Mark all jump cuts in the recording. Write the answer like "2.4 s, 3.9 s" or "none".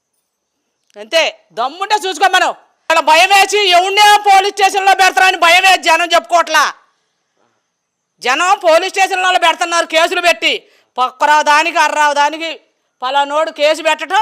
2.9 s